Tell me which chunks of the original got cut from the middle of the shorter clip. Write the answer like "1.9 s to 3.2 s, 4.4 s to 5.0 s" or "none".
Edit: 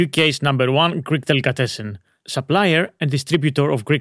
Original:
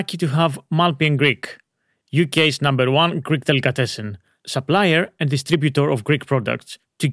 none

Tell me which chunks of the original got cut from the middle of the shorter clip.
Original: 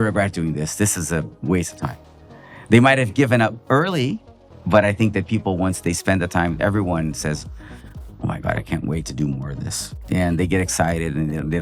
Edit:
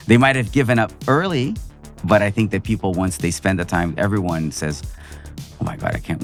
none

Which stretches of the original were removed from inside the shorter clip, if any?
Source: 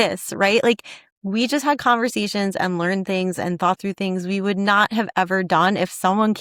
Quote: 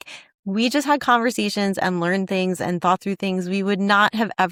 none

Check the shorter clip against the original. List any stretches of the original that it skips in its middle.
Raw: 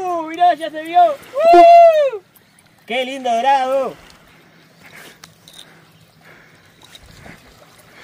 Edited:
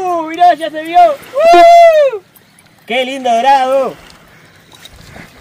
4.3 s to 6.4 s

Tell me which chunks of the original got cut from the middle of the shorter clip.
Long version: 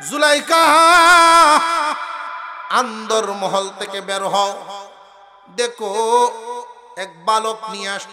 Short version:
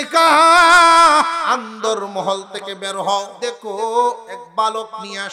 1.8 s to 2.7 s, 4.6 s to 5.5 s, 6.5 s to 7.0 s

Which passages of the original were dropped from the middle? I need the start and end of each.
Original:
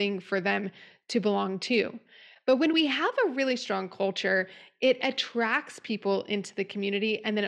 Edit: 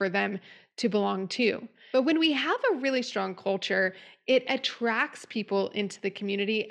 2.0 s to 2.3 s

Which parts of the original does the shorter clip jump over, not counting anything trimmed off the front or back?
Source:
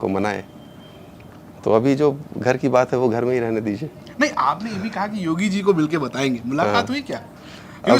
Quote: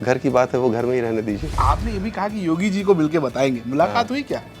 3.9 s to 4.3 s

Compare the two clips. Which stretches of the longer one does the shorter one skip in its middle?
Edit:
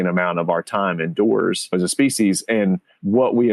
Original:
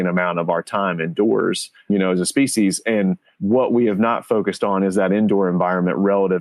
1.7 s to 2.1 s

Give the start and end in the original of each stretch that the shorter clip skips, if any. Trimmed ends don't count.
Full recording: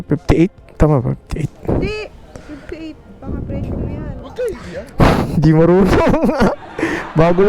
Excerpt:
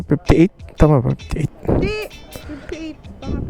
none

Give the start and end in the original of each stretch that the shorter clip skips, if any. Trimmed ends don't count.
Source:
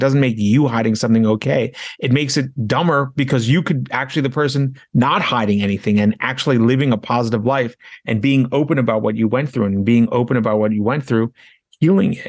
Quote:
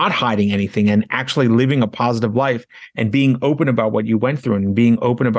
none

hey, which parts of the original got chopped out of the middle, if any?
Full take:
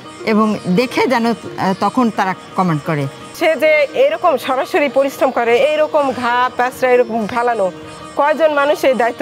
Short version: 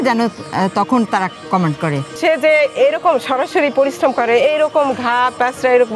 3.1 s to 3.3 s

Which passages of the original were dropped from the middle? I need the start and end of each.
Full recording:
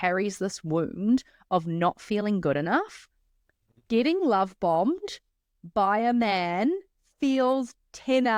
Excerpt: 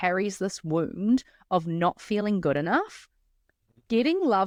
none

